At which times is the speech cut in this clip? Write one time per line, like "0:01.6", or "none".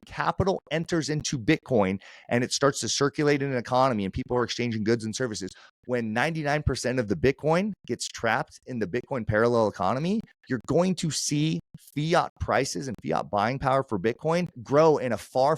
0:05.7